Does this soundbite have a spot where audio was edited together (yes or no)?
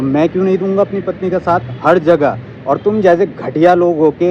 no